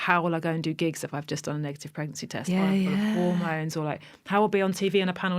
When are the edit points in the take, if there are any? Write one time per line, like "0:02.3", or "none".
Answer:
none